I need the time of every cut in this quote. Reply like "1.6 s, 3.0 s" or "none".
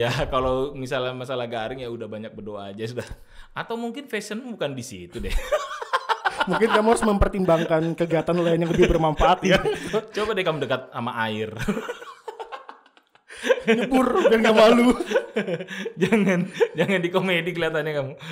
none